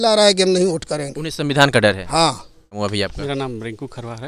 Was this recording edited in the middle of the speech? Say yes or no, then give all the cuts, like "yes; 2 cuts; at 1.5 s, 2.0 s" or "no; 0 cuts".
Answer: yes; 1 cut; at 2.8 s